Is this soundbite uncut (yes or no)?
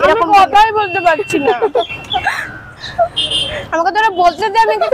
yes